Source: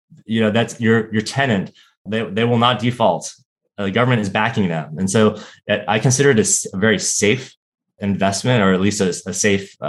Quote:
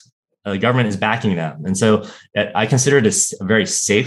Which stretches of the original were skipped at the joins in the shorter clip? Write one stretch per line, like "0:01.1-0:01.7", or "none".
none